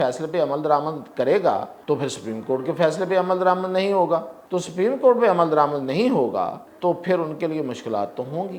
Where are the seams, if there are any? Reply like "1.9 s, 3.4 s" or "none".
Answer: 1.7 s, 4.4 s, 6.7 s